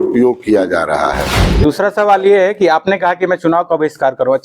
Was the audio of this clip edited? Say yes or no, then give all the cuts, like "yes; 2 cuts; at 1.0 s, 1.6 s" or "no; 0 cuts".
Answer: yes; 1 cut; at 1.4 s